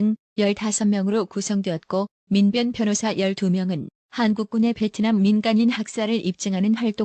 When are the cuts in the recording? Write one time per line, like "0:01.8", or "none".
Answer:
0:02.7

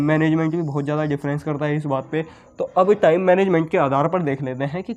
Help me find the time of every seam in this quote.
none

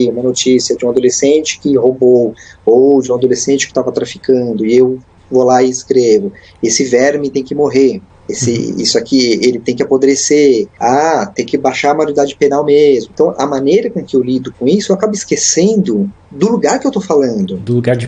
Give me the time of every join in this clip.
none

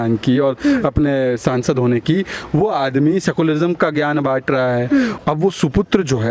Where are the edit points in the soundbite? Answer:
0:05.2

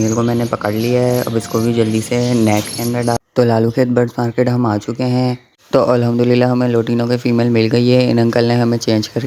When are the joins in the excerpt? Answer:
0:03.2
0:05.5

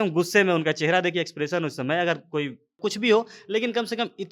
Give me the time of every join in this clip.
0:02.8

